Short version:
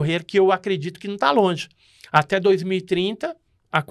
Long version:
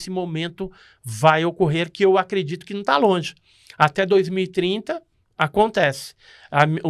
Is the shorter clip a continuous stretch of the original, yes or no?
yes